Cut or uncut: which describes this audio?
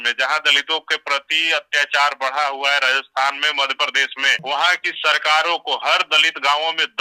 cut